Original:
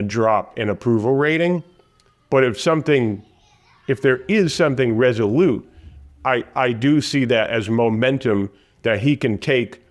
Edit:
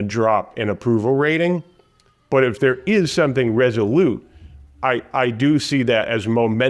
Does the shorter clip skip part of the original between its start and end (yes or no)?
yes